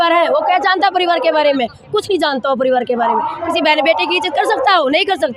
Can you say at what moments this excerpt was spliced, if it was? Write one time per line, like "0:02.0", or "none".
none